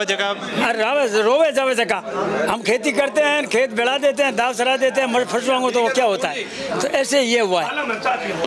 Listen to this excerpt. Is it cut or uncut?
uncut